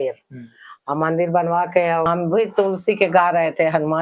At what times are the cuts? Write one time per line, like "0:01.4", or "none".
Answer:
0:02.1